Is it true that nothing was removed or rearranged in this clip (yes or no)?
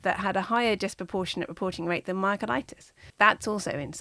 no